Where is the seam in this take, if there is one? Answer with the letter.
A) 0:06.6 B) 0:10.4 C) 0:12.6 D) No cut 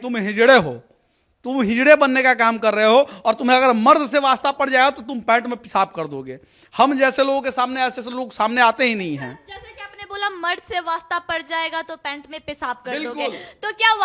D